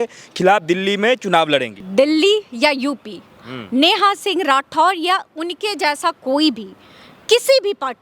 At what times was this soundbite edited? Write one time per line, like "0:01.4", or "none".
0:01.8